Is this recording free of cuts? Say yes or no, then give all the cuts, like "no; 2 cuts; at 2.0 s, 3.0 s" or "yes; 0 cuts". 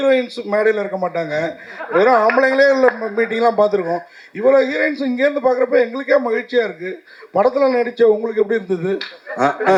yes; 0 cuts